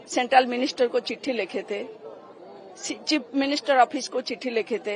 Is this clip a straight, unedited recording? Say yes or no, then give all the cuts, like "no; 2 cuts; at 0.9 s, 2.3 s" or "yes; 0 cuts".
yes; 0 cuts